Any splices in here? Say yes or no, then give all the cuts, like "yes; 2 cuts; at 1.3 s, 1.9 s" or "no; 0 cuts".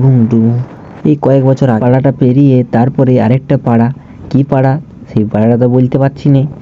yes; 1 cut; at 1.8 s